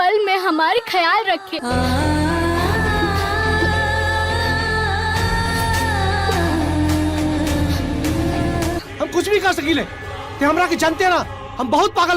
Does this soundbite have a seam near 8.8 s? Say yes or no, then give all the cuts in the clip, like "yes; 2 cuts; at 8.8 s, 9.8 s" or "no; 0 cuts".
yes; 2 cuts; at 1.5 s, 8.8 s